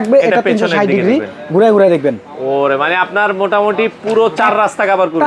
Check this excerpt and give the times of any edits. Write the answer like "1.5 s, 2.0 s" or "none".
none